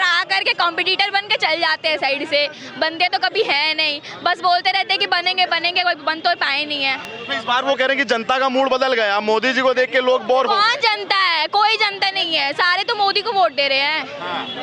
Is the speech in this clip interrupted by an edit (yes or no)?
no